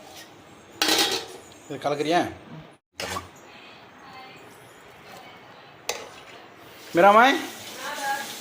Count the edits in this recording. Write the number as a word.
one